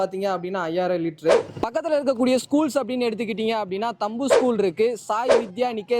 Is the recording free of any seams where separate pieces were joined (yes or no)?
no